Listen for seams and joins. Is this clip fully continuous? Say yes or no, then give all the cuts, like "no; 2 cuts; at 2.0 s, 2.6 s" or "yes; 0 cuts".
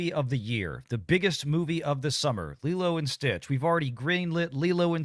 yes; 0 cuts